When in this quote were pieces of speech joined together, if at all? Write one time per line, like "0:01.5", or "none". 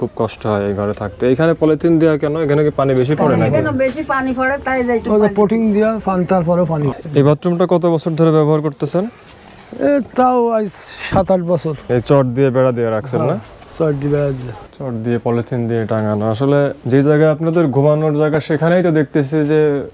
0:06.9
0:11.8
0:14.6